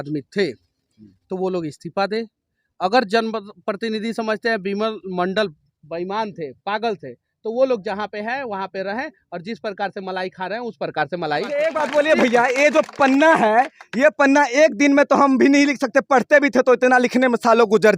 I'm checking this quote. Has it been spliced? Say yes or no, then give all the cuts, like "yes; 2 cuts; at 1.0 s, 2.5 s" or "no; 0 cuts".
yes; 1 cut; at 11.6 s